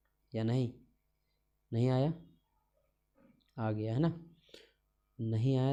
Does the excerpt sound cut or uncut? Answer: uncut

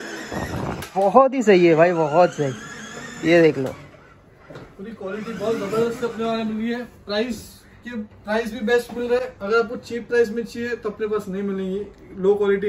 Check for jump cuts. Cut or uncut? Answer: uncut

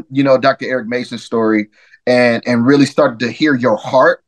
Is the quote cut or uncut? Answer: uncut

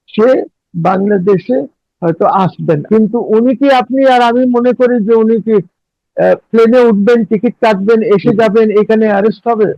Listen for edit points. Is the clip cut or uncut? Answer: cut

